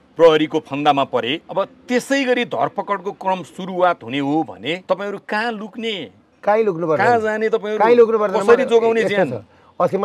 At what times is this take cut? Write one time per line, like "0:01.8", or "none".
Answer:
0:01.4
0:04.8